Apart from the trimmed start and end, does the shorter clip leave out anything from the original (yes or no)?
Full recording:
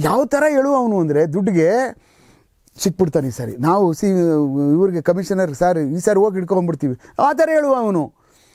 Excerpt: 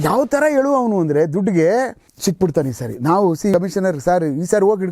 yes